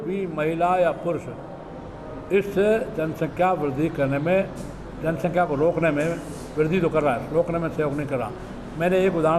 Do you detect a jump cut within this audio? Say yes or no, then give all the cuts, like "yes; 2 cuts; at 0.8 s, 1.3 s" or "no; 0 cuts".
no; 0 cuts